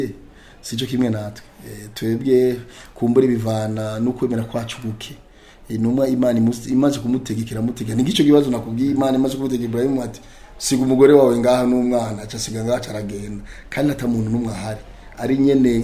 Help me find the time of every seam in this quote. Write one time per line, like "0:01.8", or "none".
none